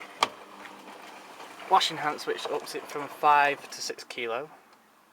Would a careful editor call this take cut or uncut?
cut